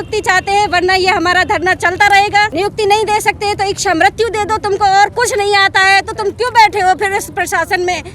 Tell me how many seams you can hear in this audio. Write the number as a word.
one